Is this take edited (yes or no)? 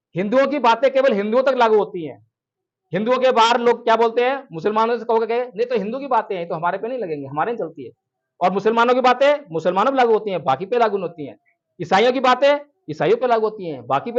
no